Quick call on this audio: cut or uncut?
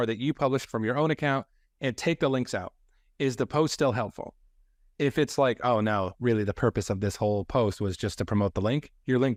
uncut